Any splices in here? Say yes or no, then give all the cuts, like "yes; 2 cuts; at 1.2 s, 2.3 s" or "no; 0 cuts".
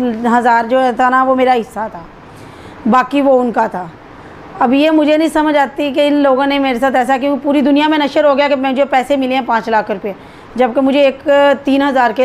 no; 0 cuts